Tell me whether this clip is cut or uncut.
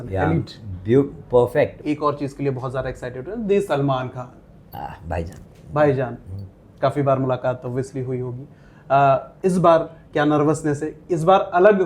cut